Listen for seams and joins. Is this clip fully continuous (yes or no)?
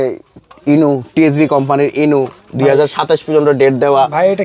yes